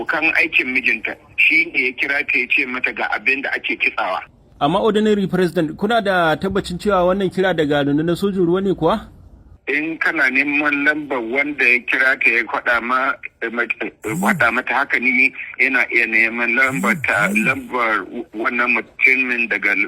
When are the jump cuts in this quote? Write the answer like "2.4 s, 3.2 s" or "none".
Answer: 4.4 s